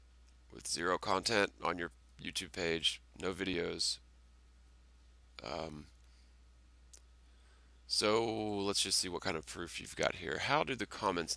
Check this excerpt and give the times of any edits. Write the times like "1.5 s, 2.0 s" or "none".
6.0 s